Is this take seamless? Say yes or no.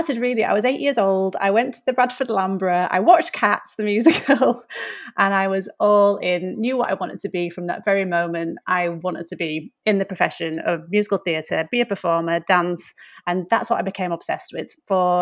yes